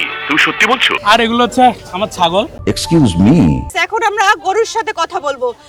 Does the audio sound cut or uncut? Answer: cut